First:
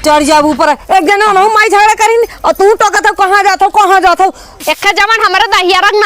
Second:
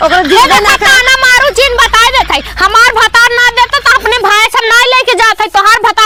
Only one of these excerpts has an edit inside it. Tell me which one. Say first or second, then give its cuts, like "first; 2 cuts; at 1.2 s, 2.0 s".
first; 1 cut; at 4.5 s